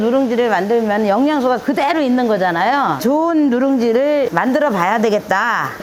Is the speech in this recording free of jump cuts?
yes; 0 cuts

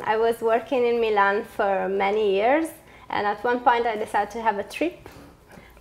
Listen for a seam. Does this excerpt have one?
yes; 1 cut; at 3.5 s

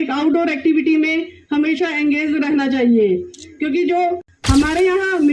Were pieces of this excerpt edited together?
yes; 1 cut; at 4.3 s

